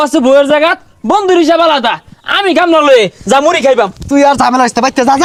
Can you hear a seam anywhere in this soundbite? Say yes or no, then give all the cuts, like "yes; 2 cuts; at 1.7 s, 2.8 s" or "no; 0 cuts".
no; 0 cuts